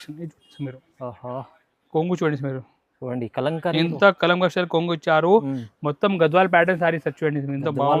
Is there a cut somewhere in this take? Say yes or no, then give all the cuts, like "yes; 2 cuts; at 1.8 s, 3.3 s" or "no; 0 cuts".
no; 0 cuts